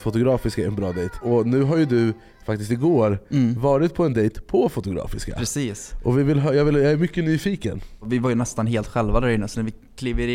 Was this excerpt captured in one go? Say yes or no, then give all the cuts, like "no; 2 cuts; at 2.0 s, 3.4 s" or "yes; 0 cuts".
no; 2 cuts; at 1.2 s, 8.0 s